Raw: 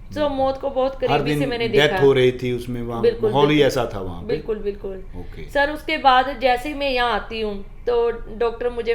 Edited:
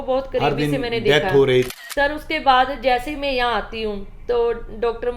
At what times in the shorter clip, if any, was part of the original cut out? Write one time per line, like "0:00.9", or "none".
0:01.8